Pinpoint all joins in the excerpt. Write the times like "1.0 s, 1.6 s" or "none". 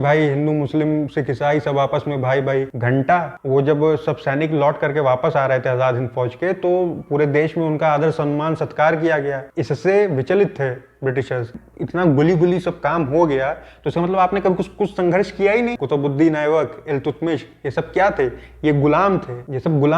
3.3 s, 11.5 s, 15.8 s